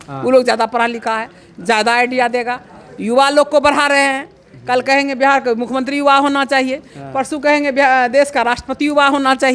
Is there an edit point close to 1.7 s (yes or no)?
no